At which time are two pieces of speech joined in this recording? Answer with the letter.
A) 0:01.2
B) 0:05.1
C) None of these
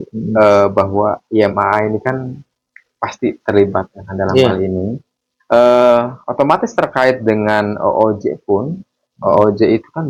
C